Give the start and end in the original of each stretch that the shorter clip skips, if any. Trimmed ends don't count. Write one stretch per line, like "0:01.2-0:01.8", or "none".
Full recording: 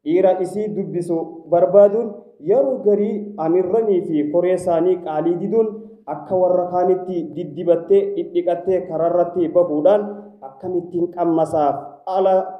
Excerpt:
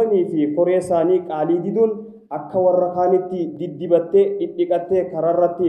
none